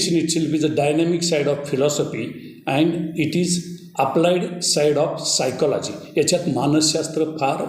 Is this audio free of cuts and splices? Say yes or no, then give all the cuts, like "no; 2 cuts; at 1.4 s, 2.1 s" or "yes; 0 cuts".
yes; 0 cuts